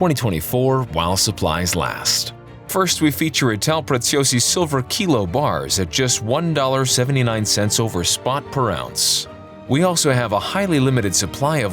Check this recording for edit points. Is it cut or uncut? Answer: uncut